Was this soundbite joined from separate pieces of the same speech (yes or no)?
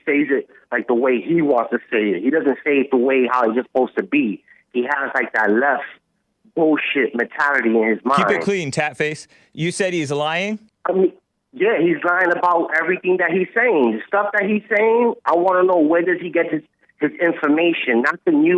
yes